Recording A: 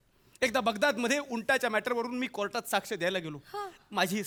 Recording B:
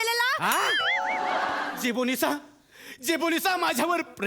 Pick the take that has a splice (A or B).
B